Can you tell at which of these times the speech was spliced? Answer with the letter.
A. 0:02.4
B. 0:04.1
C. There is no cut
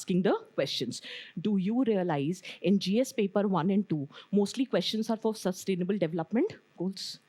C